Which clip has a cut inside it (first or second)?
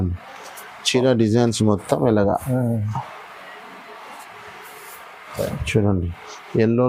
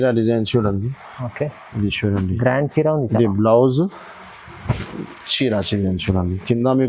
second